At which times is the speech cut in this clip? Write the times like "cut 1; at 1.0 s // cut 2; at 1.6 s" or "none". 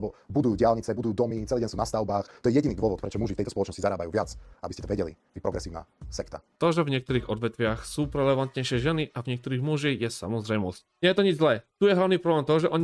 none